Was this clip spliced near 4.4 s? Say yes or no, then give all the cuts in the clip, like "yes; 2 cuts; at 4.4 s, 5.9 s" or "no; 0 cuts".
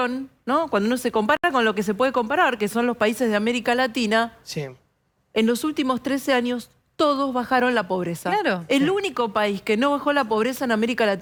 no; 0 cuts